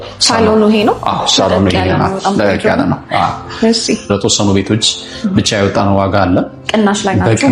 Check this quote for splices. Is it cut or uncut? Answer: cut